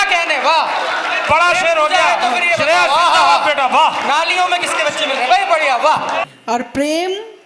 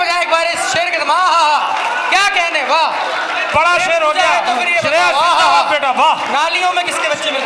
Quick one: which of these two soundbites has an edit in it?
first; 1 cut; at 6.3 s

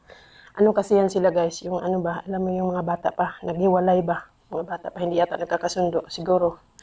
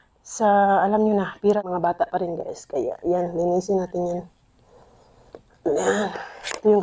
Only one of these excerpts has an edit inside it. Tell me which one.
second; 1 cut; at 1.7 s

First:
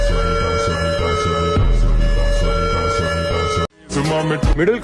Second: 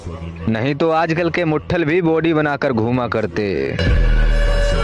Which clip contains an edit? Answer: first; 1 cut; at 3.8 s

